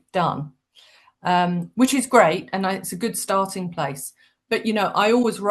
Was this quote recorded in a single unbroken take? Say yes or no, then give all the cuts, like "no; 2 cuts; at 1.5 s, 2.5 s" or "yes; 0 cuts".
yes; 0 cuts